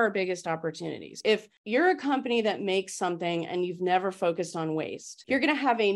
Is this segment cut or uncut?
uncut